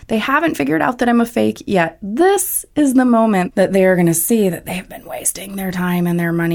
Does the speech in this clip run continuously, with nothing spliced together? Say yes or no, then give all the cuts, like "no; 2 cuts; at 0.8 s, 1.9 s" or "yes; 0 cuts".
no; 1 cut; at 3.5 s